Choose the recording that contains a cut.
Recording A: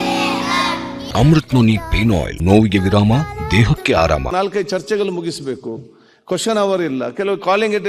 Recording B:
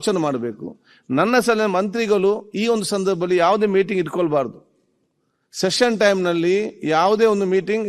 A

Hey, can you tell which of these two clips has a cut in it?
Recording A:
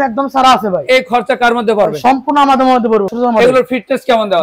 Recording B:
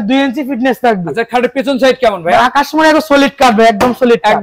A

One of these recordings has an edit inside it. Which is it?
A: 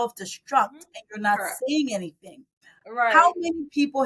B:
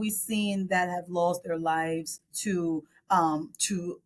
A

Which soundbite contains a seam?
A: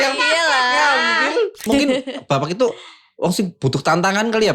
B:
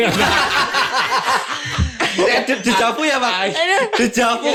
A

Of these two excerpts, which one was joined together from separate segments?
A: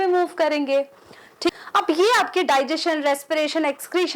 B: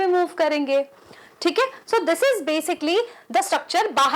A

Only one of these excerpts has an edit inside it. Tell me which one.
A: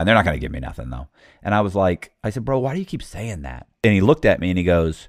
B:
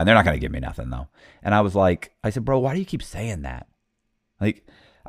A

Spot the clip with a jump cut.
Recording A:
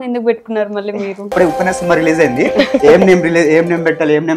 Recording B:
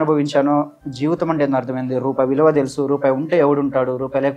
A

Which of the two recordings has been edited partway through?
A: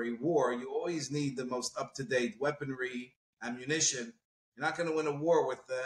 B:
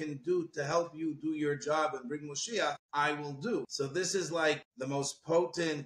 B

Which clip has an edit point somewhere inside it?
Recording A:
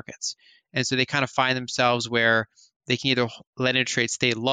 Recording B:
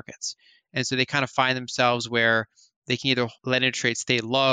B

